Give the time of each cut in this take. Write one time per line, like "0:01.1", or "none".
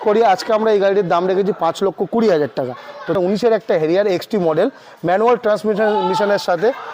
0:03.2